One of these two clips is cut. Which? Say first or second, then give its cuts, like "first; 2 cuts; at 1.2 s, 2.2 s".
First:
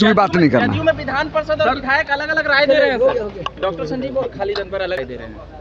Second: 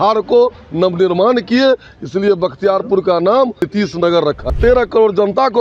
second; 1 cut; at 4.6 s